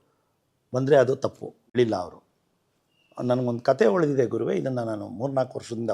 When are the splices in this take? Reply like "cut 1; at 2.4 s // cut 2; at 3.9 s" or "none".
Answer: cut 1; at 1.7 s

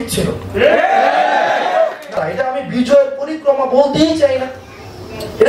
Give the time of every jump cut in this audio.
cut 1; at 2.2 s

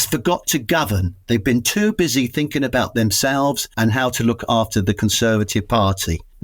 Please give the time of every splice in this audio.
none

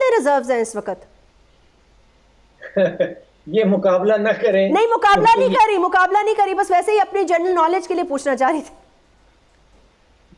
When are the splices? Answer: none

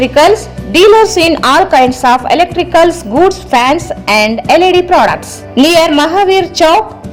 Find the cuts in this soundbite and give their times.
none

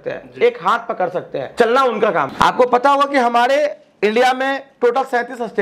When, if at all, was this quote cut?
cut 1; at 1.4 s // cut 2; at 2.3 s

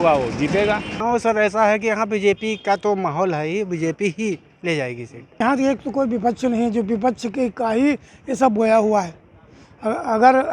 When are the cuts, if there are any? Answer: cut 1; at 1.0 s // cut 2; at 5.4 s

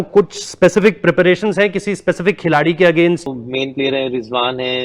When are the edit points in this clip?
cut 1; at 3.3 s

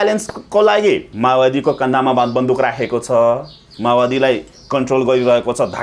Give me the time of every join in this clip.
cut 1; at 1.1 s

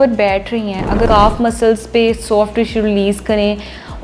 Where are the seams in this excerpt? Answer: cut 1; at 1.1 s

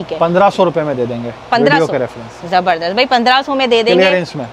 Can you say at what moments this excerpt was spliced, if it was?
none

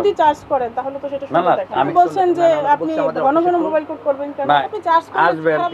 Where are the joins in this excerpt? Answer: cut 1; at 1.9 s // cut 2; at 4.6 s

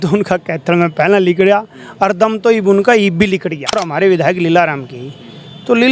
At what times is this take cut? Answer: cut 1; at 3.8 s

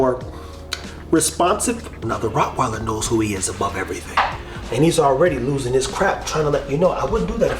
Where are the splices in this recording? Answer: cut 1; at 2.0 s // cut 2; at 4.5 s

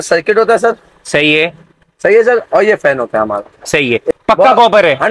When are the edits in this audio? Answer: cut 1; at 4.1 s

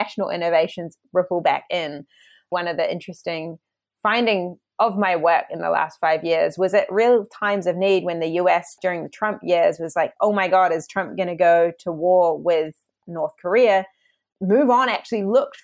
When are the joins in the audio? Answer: cut 1; at 2.5 s // cut 2; at 4.6 s // cut 3; at 8.8 s

